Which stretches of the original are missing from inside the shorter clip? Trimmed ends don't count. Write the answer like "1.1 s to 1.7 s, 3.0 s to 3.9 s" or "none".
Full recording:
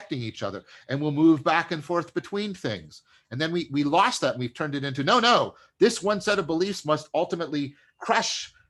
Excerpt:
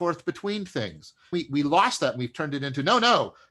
3.2 s to 3.5 s

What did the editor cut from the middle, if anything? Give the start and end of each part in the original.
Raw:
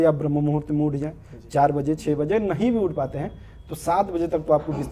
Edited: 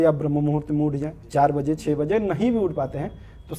1.1 s to 1.3 s

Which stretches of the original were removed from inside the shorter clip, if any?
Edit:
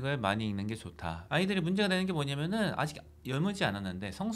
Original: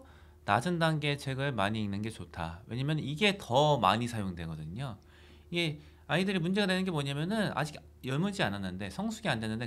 2.6 s to 6.0 s

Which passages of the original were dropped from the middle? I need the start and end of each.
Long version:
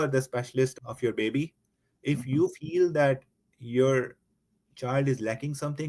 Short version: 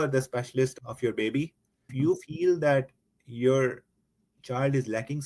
1.9 s to 2.2 s

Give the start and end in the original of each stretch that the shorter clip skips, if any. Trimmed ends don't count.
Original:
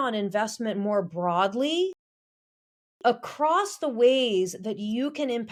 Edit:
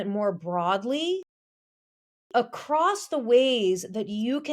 none

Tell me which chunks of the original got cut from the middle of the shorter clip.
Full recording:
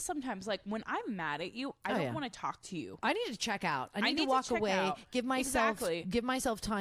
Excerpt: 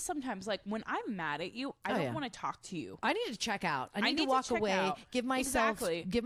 none

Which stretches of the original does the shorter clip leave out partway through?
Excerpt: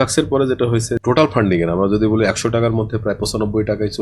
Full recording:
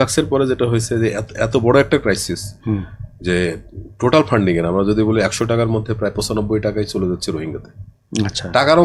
1.0 s to 3.9 s

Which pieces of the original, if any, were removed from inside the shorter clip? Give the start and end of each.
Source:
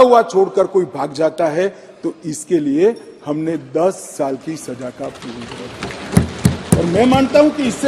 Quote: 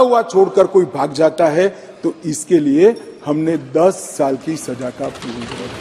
none

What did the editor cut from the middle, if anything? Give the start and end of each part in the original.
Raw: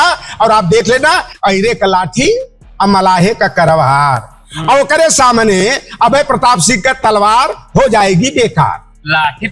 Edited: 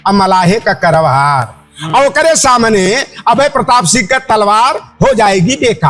none

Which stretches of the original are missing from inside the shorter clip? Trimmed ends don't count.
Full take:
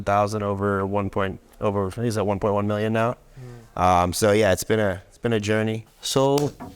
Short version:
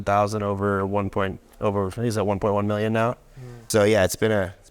3.6 s to 4.1 s

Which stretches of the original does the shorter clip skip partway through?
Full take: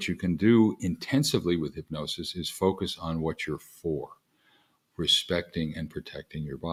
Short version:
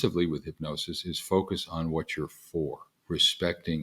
4.2 s to 4.8 s

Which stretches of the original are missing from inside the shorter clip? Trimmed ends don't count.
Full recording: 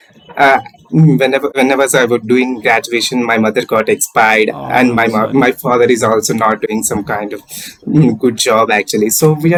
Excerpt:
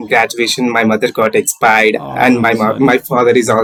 none

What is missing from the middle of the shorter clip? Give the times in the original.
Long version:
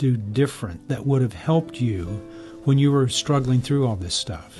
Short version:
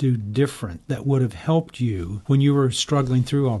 2.1 s to 2.5 s

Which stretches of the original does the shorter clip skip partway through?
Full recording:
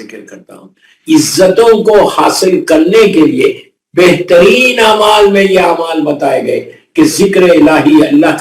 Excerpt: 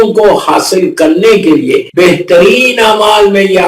3.6 s to 3.9 s

